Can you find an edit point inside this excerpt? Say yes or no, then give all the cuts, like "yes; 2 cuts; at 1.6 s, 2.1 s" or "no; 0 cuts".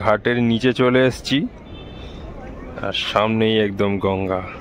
no; 0 cuts